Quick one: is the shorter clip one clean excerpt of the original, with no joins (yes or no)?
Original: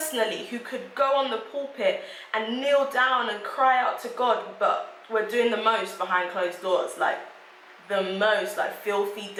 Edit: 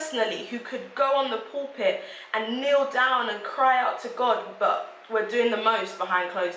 yes